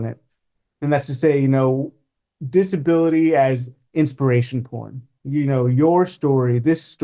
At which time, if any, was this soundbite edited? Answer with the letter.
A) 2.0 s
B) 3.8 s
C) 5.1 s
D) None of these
B